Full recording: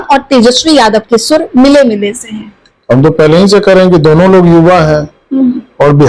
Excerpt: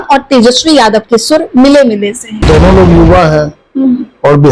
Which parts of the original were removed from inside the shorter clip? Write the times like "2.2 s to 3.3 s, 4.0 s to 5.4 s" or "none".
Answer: 2.5 s to 4.0 s